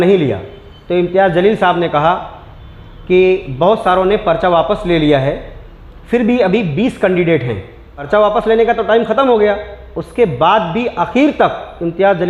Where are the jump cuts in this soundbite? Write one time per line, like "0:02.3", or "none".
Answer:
none